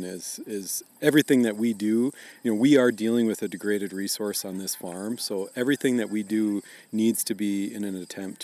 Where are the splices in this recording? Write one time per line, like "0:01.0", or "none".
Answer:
none